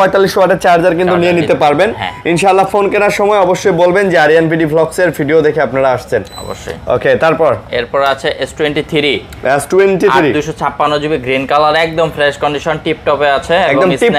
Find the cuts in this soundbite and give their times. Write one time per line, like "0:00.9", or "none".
none